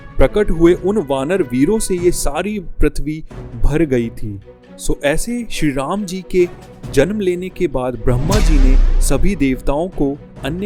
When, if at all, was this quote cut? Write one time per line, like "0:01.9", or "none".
none